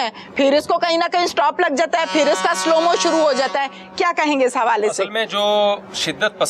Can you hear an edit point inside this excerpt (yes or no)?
no